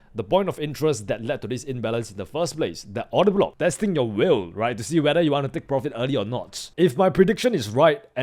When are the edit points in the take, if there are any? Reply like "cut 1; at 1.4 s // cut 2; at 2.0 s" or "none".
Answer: cut 1; at 3.5 s // cut 2; at 6.6 s